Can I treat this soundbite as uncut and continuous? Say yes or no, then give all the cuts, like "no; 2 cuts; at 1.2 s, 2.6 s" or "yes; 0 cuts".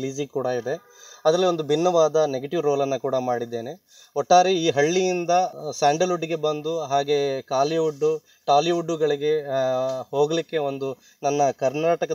no; 1 cut; at 5.5 s